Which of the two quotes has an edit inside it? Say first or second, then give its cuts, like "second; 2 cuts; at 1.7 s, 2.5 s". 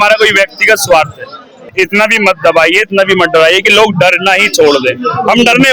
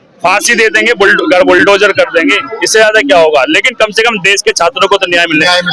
first; 1 cut; at 1.7 s